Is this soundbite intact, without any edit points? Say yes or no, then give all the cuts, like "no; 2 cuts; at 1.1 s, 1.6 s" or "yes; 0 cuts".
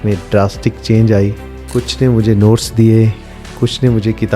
no; 1 cut; at 1.5 s